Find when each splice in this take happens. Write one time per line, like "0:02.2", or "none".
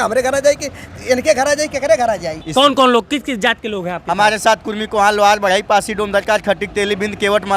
0:02.4